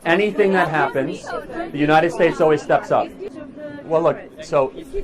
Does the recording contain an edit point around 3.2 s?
yes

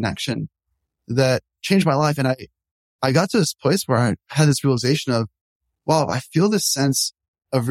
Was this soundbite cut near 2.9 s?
no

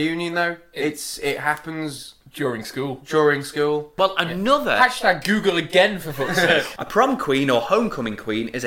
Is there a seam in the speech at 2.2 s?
no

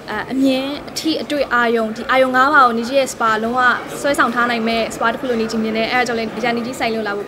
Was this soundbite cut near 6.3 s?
yes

